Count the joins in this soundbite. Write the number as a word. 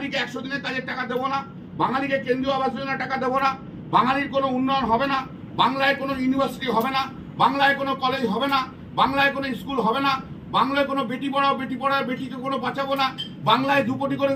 zero